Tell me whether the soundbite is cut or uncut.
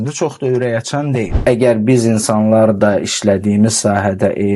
cut